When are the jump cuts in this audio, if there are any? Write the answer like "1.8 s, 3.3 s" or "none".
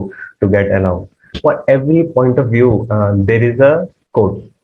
1.3 s